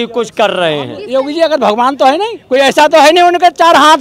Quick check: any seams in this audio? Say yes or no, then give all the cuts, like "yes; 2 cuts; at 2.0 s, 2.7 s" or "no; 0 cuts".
yes; 2 cuts; at 1.0 s, 2.4 s